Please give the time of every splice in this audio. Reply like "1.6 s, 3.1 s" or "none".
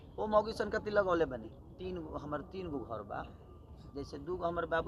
1.8 s